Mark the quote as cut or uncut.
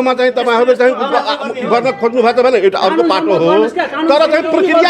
uncut